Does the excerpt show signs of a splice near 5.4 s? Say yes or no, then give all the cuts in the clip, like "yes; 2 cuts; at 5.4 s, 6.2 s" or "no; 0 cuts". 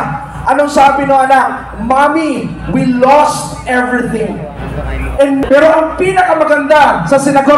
yes; 1 cut; at 5.4 s